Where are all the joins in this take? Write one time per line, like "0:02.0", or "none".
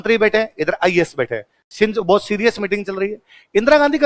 none